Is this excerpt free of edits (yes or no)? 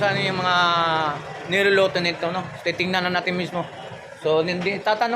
yes